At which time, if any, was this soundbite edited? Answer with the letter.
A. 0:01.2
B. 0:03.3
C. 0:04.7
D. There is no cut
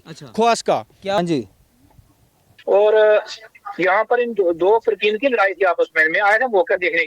A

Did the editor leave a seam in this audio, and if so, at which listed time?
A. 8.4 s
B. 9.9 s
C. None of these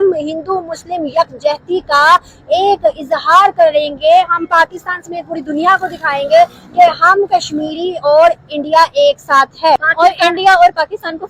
B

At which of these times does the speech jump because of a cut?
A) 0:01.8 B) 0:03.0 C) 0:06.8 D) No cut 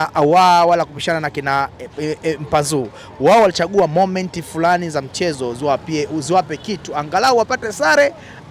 D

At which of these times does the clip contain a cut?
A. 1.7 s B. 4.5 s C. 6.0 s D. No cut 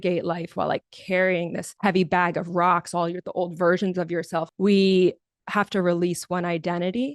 B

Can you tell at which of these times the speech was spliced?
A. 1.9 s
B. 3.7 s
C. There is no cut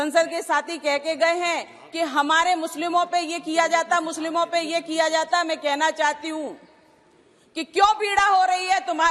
C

